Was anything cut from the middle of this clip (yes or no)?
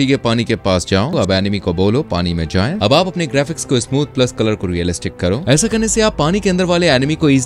yes